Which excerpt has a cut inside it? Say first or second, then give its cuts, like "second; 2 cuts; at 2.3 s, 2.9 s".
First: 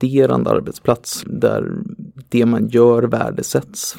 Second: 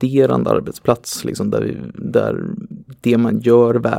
first; 1 cut; at 1.1 s